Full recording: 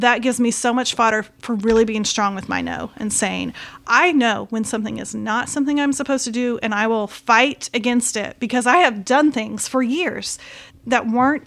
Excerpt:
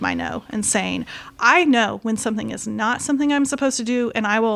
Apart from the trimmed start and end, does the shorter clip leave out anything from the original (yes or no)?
no